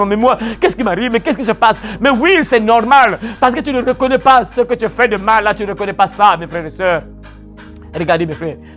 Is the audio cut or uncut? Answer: uncut